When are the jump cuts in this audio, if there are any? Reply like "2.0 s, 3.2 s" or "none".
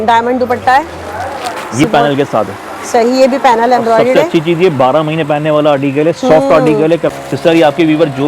1.8 s, 7.0 s